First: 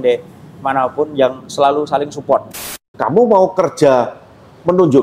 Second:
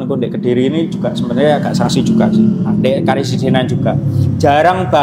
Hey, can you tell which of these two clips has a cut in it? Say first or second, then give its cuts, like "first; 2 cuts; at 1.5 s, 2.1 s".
first; 1 cut; at 2.7 s